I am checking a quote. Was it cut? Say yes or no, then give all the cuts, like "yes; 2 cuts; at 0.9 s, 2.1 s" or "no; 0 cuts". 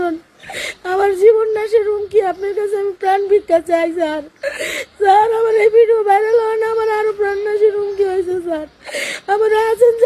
no; 0 cuts